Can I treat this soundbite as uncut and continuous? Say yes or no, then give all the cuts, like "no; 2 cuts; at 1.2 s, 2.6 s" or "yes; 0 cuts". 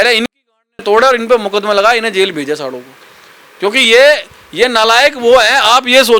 yes; 0 cuts